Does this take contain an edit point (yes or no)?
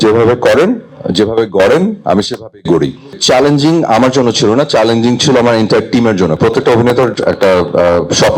yes